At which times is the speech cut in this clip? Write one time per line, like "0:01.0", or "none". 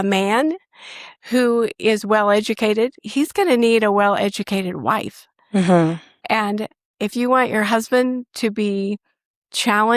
none